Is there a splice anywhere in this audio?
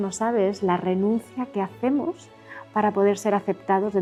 no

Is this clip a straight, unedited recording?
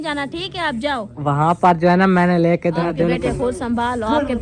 no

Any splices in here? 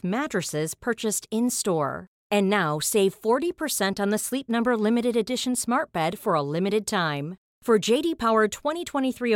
no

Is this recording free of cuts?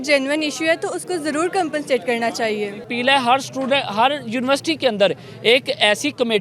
no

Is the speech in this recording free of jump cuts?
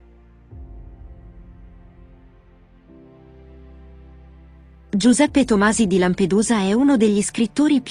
no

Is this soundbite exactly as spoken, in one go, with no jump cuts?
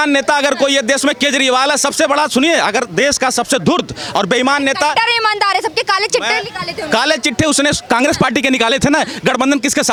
yes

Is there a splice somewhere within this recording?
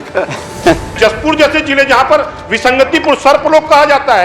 yes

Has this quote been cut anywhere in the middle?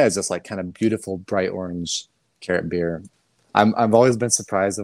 yes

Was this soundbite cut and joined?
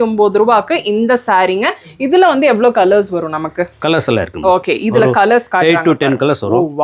no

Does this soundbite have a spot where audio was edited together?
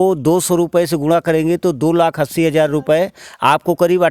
no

